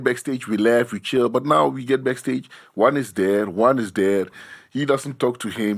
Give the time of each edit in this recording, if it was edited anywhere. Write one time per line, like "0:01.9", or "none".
none